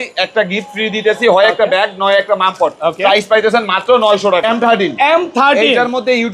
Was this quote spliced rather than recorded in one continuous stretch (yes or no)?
yes